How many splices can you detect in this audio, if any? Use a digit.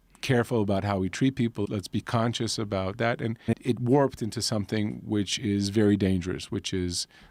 0